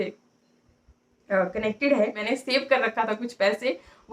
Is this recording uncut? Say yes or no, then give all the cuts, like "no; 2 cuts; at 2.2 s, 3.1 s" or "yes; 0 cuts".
no; 1 cut; at 2.2 s